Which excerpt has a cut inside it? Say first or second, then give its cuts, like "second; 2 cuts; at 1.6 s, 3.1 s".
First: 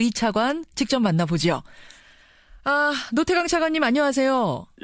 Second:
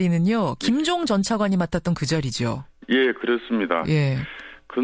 first; 1 cut; at 3.0 s